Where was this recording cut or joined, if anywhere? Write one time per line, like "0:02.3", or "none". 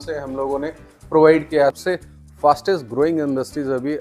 0:01.8